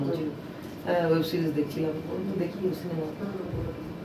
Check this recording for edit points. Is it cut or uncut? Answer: uncut